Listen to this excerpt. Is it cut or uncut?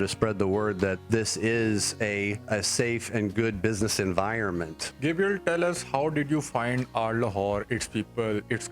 cut